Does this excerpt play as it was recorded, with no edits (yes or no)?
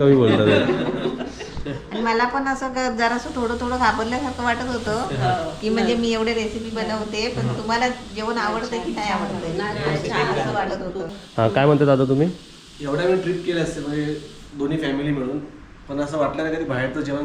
yes